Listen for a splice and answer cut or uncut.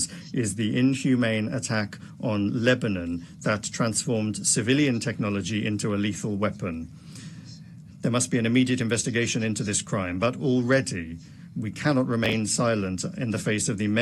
uncut